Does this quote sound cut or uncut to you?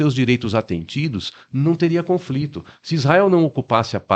uncut